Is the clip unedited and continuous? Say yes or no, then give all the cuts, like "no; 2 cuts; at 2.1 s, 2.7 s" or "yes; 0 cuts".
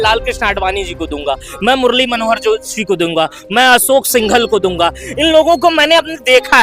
yes; 0 cuts